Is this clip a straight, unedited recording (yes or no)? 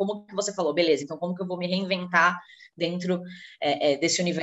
yes